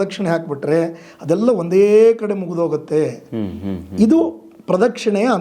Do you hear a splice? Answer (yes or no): no